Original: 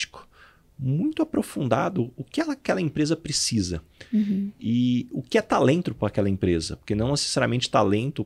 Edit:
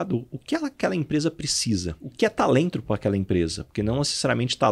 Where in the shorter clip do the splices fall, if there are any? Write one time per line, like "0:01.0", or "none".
0:02.0